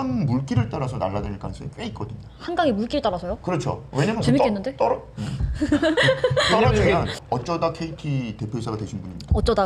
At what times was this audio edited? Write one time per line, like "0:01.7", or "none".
0:07.2